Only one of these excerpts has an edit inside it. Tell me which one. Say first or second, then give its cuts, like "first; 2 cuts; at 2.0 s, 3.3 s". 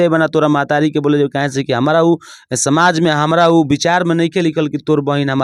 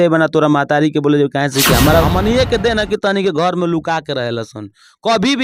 second; 1 cut; at 2.0 s